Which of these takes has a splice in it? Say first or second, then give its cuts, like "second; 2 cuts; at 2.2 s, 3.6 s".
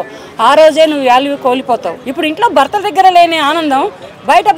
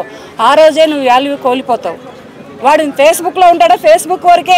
first; 1 cut; at 2.0 s